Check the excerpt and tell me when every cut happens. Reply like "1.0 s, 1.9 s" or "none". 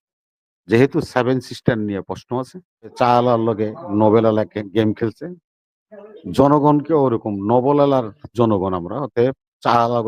2.9 s